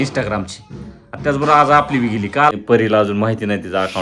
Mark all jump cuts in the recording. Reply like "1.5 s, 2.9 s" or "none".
2.6 s